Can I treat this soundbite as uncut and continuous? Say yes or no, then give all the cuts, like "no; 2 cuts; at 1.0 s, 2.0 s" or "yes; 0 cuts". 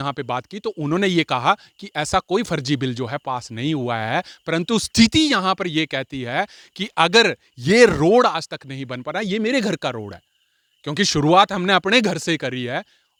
yes; 0 cuts